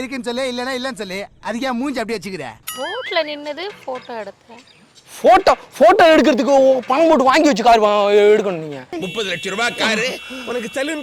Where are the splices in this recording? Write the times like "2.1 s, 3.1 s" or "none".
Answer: none